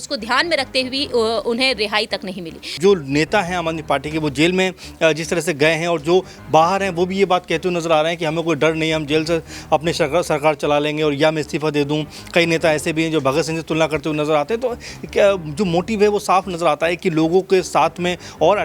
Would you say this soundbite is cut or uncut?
cut